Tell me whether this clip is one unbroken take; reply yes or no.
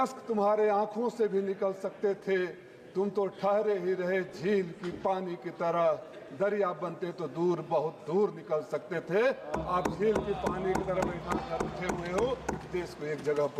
yes